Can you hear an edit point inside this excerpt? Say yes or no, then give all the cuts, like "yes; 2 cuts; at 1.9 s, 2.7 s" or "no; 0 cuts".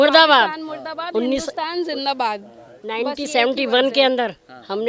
no; 0 cuts